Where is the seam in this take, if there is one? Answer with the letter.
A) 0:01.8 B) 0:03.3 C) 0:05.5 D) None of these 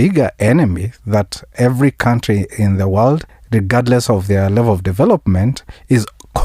B